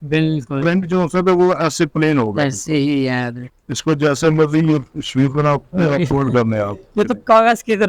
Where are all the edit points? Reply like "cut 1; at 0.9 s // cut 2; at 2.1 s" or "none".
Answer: cut 1; at 3.4 s